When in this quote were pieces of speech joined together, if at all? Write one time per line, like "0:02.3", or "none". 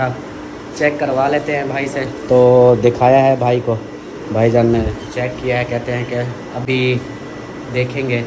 none